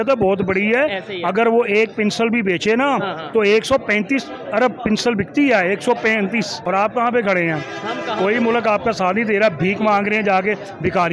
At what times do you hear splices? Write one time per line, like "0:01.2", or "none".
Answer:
0:06.6